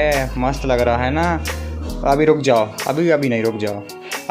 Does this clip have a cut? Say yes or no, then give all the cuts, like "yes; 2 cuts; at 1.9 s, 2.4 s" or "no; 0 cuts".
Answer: no; 0 cuts